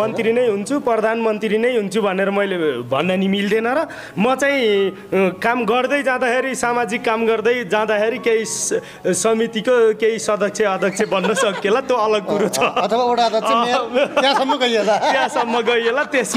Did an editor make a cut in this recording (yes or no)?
no